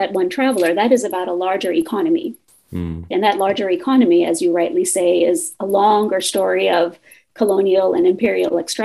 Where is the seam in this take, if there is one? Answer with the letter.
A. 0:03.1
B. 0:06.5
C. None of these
A